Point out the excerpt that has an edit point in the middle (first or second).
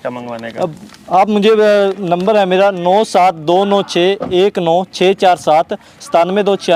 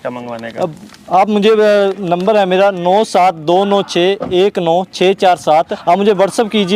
second